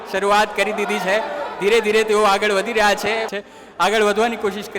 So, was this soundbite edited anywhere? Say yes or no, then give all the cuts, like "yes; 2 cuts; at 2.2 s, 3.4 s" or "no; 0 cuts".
yes; 1 cut; at 3.4 s